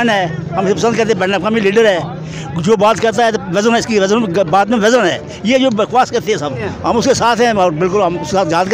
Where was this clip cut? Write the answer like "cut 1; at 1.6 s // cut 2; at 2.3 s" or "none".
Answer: cut 1; at 6.7 s